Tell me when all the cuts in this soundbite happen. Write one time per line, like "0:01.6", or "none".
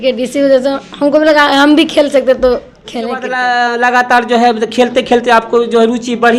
0:03.3

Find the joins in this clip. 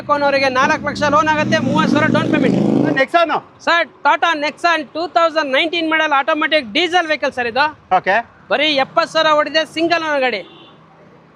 none

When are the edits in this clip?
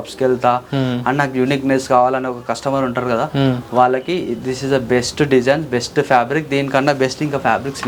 none

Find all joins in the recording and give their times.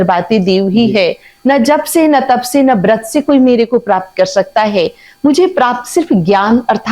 none

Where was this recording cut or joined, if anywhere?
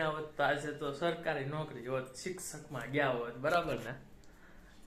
none

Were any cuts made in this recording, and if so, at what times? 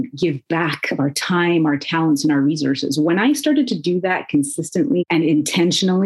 0:05.0

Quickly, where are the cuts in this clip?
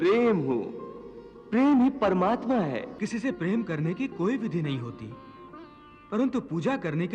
0:03.0

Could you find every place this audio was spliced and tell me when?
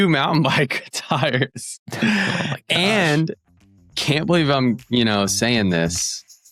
none

